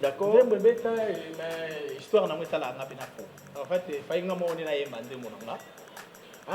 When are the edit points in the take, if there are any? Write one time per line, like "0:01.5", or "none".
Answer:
0:03.5